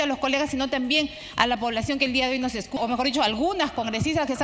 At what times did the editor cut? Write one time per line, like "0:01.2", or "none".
0:02.8

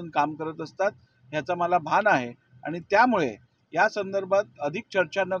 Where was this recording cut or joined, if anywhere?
none

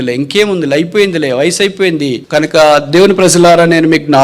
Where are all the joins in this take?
0:02.2

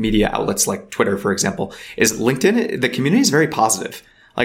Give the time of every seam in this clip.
none

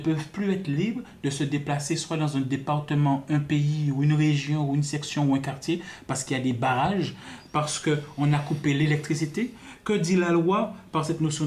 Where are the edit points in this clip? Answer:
none

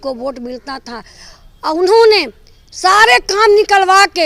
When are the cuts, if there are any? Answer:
none

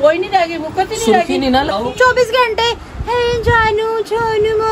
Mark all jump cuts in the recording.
0:01.7

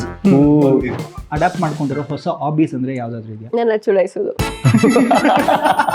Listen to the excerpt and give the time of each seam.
0:00.9

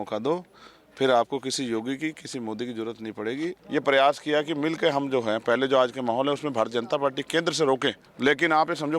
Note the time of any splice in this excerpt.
0:03.6
0:08.1

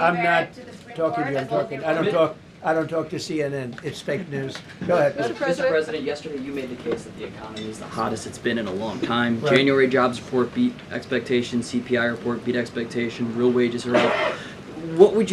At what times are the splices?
none

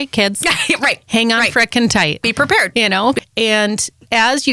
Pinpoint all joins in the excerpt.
0:03.2

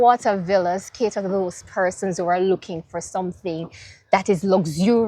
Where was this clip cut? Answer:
none

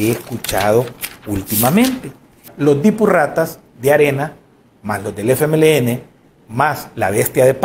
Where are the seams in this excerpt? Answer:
0:02.5

